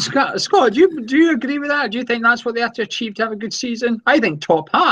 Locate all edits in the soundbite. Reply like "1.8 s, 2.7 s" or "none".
none